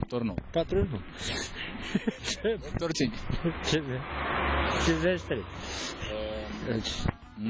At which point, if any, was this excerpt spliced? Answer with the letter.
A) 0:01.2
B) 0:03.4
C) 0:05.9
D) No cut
B